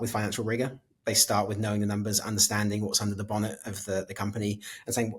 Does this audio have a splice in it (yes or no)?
no